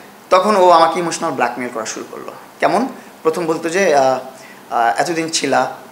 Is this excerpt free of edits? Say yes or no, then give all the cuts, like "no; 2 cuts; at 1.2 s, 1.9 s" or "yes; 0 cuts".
yes; 0 cuts